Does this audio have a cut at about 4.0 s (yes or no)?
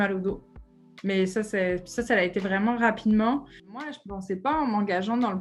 yes